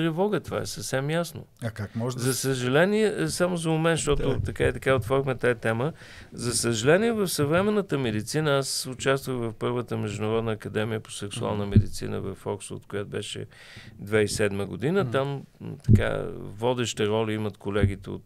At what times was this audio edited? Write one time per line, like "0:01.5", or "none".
none